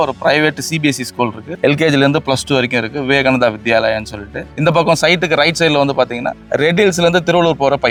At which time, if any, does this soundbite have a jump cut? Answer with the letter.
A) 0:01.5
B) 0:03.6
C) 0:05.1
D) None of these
D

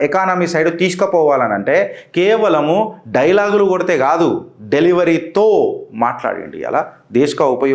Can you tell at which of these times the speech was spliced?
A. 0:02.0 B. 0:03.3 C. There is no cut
C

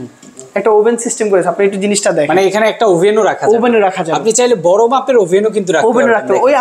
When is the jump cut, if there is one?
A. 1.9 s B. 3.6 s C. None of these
C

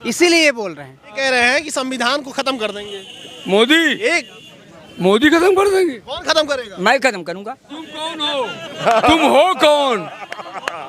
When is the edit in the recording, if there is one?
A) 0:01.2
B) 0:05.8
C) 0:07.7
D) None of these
A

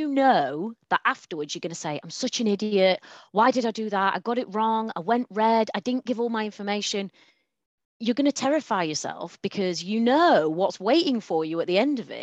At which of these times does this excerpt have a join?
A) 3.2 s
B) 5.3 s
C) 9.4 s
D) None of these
D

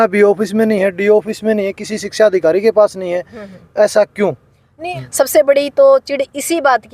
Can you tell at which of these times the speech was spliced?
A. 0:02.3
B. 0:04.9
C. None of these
B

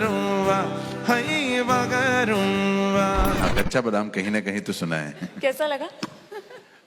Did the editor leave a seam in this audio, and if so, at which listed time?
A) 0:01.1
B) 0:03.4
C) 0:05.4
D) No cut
B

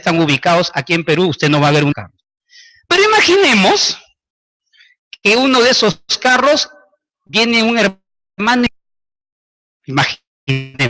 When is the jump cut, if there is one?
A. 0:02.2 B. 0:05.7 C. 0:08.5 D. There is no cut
B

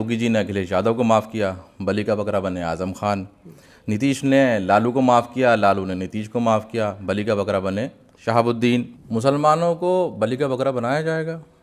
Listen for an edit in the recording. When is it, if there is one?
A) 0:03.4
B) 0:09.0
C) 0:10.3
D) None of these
B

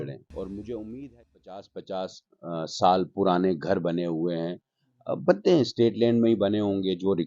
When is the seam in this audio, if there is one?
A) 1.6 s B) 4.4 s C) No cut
A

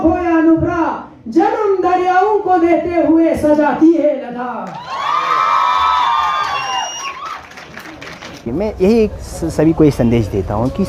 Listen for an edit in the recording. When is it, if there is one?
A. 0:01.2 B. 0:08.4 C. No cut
B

